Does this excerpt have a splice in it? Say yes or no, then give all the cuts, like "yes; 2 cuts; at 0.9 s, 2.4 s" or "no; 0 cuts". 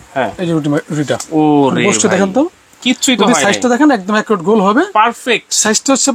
no; 0 cuts